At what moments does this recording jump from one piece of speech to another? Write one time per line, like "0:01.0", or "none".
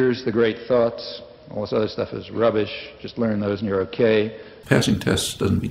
0:04.5